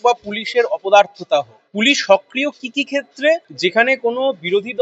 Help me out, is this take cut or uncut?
cut